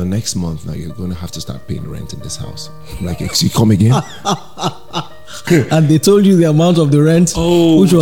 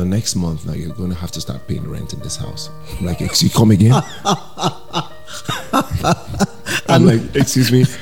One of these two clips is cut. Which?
first; 1 cut; at 5.4 s

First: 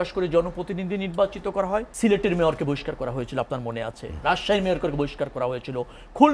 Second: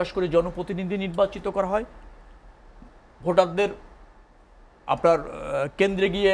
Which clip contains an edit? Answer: first; 1 cut; at 1.9 s

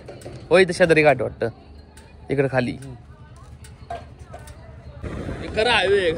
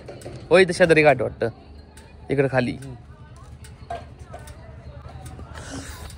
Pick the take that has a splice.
first; 1 cut; at 5.0 s

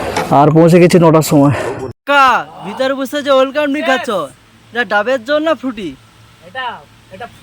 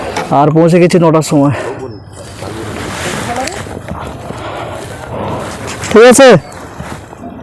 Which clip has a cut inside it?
first; 1 cut; at 1.9 s

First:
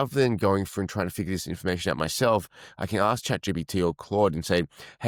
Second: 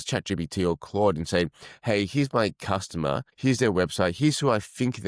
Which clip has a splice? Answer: second; 1 cut; at 3.3 s

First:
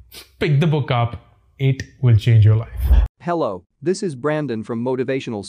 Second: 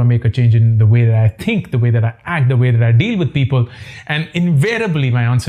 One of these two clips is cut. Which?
first; 1 cut; at 2.7 s

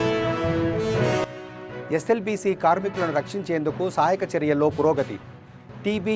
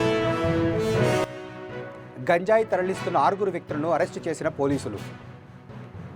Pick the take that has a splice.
second; 1 cut; at 1.3 s

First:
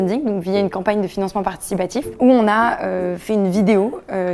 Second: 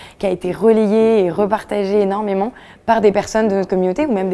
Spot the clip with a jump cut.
first; 1 cut; at 2.1 s

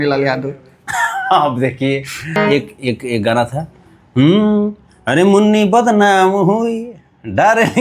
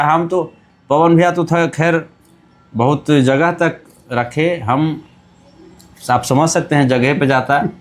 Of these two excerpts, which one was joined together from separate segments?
first; 1 cut; at 2.3 s

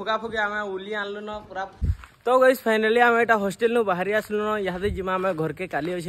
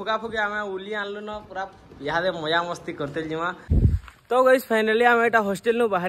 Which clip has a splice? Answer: first; 1 cut; at 1.9 s

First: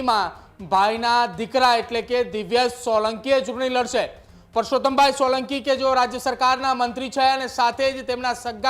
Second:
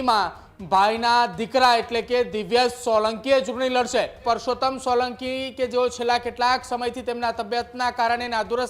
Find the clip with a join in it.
second; 1 cut; at 4.2 s

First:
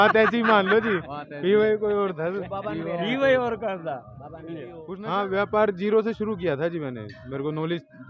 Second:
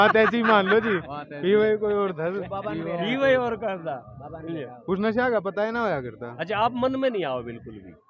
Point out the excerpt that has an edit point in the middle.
first; 1 cut; at 4.8 s

